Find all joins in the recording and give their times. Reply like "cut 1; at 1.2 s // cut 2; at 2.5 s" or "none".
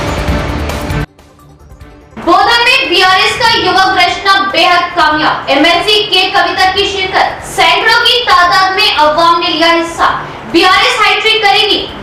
none